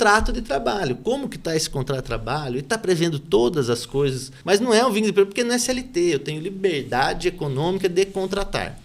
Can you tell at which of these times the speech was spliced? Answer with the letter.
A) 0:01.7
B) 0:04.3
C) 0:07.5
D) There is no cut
B